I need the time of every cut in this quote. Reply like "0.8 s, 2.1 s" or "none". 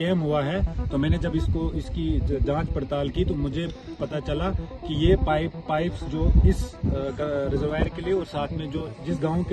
none